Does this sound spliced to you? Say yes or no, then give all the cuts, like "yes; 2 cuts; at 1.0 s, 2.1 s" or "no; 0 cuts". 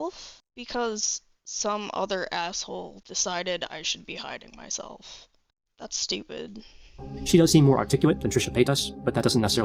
no; 0 cuts